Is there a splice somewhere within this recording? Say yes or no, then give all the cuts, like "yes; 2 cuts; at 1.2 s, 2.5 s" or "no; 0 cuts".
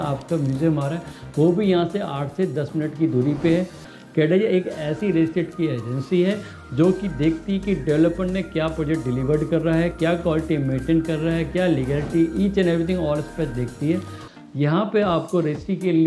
yes; 2 cuts; at 3.9 s, 14.2 s